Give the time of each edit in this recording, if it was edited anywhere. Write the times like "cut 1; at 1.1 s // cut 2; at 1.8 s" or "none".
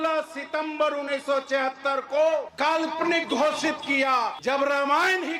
cut 1; at 2.5 s // cut 2; at 4.4 s